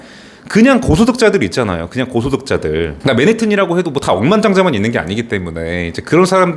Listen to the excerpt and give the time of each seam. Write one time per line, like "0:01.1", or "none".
none